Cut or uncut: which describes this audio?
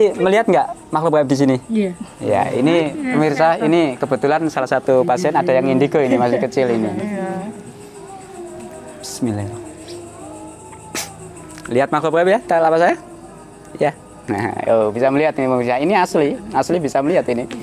uncut